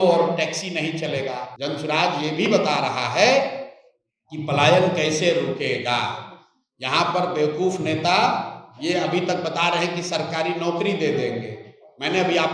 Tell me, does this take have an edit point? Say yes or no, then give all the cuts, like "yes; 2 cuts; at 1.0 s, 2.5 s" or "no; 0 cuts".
yes; 1 cut; at 1.5 s